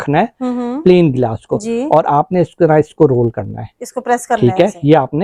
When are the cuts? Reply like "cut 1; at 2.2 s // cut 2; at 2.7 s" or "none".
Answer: none